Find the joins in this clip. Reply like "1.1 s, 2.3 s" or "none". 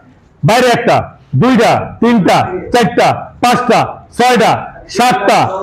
none